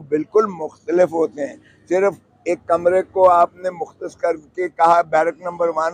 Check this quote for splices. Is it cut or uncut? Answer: uncut